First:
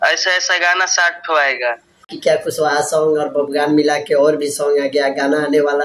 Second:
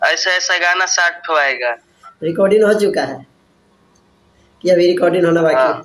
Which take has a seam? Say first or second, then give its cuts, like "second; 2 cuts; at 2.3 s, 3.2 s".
first; 1 cut; at 2.1 s